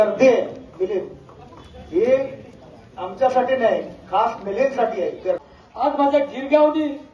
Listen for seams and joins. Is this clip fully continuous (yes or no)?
no